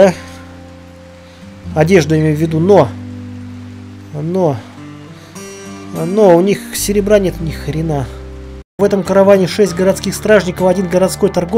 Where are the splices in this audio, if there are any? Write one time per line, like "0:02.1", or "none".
0:08.8

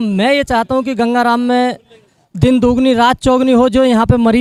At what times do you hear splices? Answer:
none

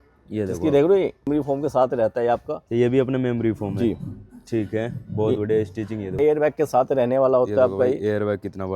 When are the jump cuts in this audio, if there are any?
0:01.3
0:06.2

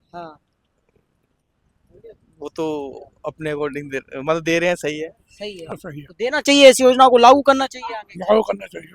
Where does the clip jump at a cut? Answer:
0:05.7

